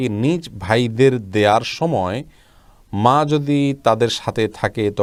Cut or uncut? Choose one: uncut